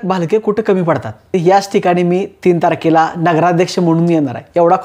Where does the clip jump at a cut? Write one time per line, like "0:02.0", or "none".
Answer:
0:01.4

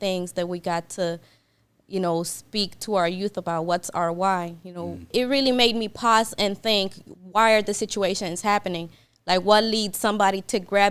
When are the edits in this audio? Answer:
none

